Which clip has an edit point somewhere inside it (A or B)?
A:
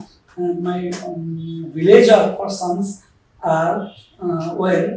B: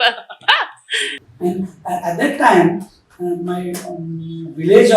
B